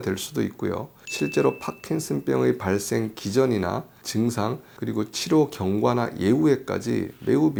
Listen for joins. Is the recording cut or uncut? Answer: uncut